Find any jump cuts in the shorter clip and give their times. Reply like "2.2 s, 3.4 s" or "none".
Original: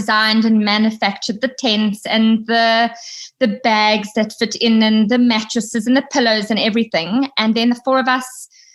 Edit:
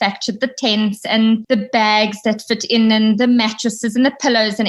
1.4 s